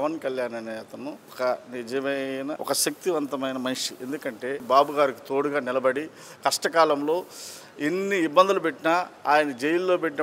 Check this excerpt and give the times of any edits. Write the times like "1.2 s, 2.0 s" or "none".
1.3 s, 2.6 s, 4.6 s